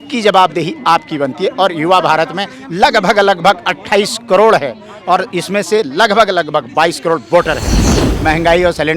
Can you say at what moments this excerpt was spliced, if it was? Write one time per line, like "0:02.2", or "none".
0:08.0